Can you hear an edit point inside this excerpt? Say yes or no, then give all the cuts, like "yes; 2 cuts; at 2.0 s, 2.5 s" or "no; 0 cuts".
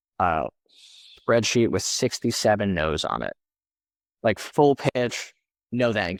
no; 0 cuts